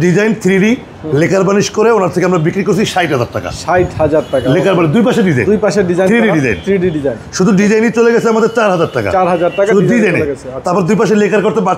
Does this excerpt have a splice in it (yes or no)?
no